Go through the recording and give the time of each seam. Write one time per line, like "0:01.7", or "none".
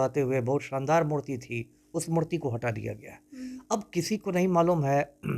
none